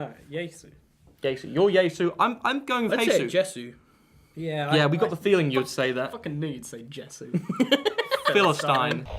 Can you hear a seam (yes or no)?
yes